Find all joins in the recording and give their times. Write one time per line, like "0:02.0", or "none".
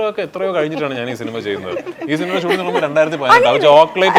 none